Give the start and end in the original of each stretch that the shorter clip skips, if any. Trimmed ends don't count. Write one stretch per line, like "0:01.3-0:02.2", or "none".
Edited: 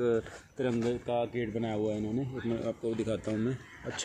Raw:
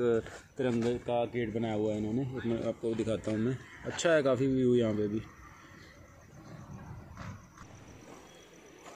none